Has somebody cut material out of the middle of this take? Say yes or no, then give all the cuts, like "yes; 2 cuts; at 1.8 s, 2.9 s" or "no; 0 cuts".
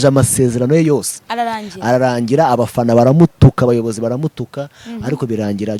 no; 0 cuts